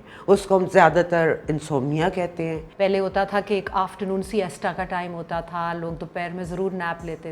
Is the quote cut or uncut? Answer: cut